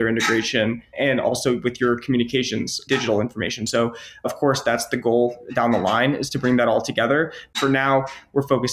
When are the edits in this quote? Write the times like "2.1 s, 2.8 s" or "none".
0.9 s, 2.8 s, 7.4 s